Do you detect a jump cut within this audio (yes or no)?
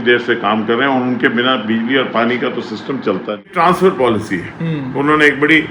yes